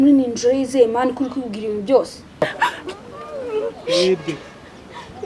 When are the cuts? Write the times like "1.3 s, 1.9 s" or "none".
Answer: 2.4 s

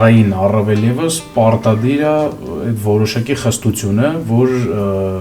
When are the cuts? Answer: none

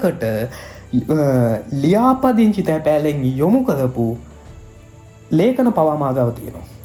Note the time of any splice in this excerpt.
none

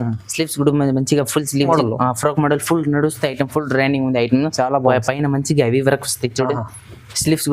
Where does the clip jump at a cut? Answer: 1.7 s

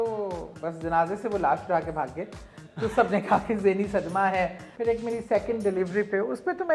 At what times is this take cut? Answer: 4.7 s

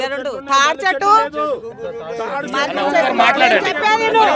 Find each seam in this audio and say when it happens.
none

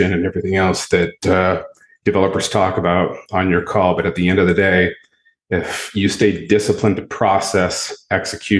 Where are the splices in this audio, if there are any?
none

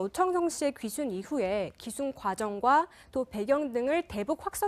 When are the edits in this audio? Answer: none

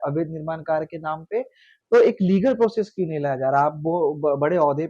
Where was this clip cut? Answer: none

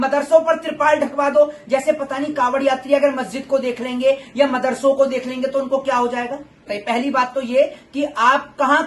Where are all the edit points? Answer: 6.7 s

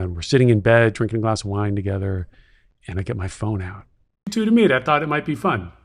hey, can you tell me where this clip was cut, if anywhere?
4.3 s

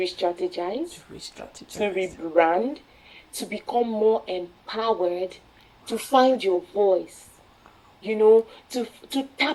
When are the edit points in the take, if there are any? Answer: none

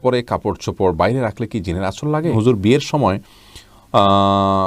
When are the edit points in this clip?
2.3 s

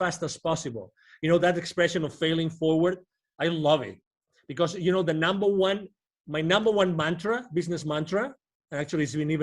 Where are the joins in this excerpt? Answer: none

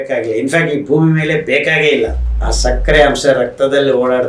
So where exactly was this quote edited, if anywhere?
2.2 s

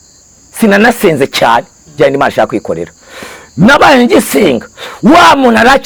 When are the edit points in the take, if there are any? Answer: none

